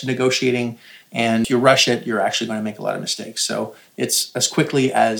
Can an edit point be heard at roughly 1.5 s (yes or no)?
yes